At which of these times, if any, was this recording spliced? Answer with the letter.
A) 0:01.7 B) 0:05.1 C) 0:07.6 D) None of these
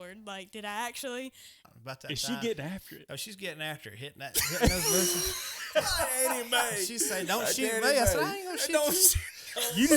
A